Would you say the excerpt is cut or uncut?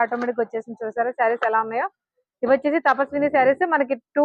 uncut